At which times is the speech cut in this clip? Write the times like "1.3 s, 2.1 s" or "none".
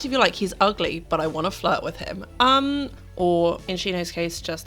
3.0 s, 3.6 s